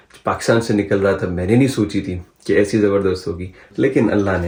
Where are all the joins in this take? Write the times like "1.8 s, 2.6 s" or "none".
none